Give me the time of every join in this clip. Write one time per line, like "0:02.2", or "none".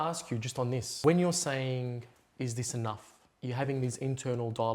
0:00.9